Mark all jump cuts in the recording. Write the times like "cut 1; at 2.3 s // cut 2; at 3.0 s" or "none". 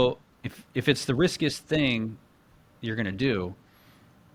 none